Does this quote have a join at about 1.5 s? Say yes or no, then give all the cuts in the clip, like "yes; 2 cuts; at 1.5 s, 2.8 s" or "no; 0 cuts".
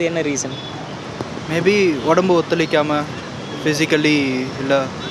no; 0 cuts